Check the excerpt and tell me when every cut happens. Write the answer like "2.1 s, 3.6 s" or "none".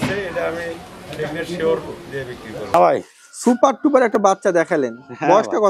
2.7 s